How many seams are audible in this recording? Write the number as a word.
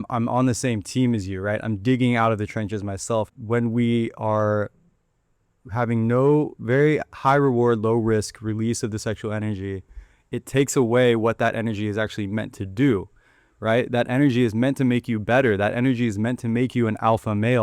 one